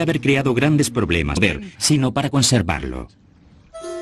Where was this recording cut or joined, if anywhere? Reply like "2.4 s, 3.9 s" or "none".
none